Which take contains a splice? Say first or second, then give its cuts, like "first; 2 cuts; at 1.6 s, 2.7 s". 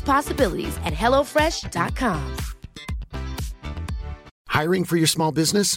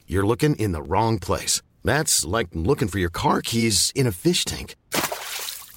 first; 1 cut; at 4.3 s